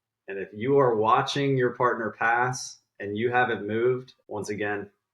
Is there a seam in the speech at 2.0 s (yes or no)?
no